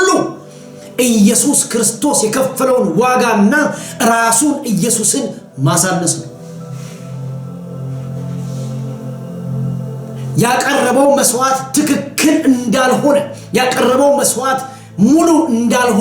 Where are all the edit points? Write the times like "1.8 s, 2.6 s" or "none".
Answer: none